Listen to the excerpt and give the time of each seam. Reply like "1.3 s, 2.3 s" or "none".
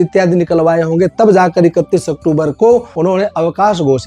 2.9 s